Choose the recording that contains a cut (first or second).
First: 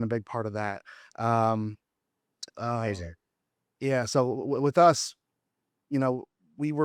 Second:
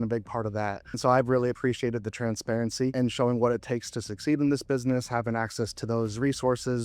second